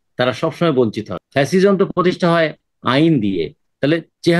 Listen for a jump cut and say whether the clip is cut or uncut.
cut